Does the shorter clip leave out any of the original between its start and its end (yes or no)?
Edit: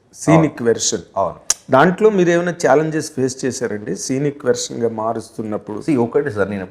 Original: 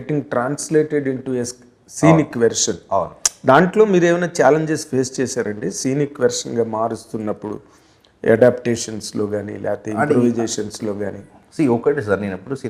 yes